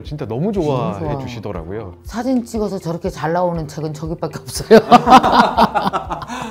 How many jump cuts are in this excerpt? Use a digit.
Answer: 0